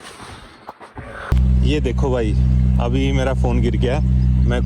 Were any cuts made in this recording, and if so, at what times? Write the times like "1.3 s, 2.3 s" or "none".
1.2 s